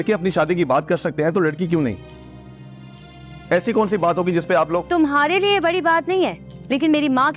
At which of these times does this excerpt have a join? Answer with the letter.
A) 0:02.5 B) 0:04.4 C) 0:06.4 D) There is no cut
D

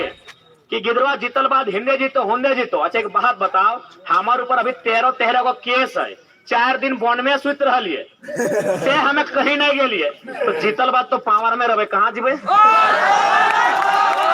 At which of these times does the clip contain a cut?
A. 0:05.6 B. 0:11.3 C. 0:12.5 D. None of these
D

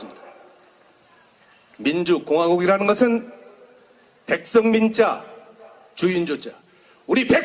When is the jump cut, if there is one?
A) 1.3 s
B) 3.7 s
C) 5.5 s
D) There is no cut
C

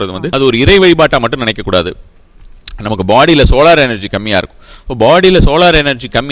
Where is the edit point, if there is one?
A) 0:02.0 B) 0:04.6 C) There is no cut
C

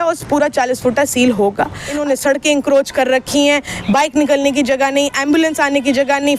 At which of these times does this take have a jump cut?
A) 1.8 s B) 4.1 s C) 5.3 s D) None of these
A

